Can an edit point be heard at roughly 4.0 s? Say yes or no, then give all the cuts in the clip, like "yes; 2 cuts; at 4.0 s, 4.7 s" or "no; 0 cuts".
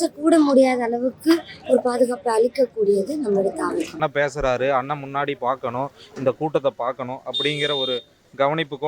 yes; 1 cut; at 4.0 s